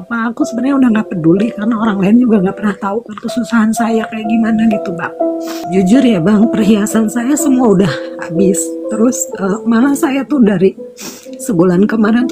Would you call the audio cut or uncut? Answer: cut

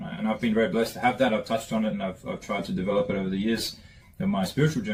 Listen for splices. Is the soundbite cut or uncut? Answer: uncut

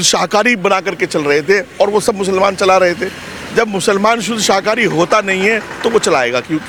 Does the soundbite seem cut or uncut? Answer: uncut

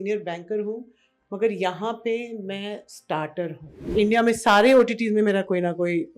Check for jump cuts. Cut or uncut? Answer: cut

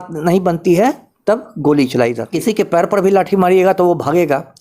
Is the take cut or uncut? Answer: cut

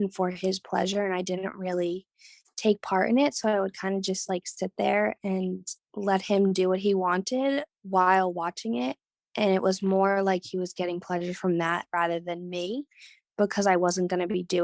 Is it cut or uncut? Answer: cut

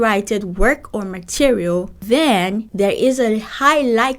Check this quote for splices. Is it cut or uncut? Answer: cut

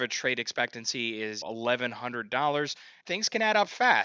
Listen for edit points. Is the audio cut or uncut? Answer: cut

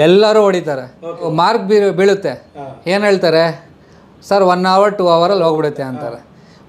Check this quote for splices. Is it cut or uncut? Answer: cut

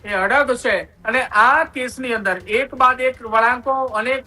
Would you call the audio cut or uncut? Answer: cut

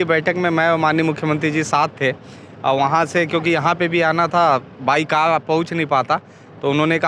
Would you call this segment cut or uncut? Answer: uncut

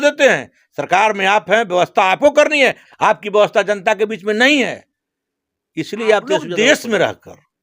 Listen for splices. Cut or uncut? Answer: cut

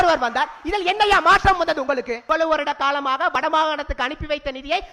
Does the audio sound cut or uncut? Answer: cut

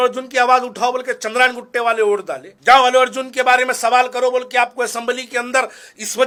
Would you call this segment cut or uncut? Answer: uncut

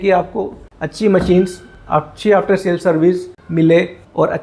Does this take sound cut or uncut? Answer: uncut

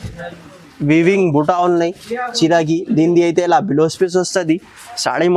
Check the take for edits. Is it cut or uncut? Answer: uncut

